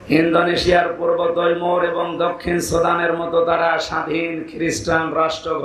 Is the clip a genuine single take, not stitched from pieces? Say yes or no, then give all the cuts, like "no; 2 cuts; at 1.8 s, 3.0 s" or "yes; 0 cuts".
yes; 0 cuts